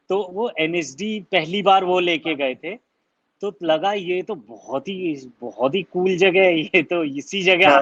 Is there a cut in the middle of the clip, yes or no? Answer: no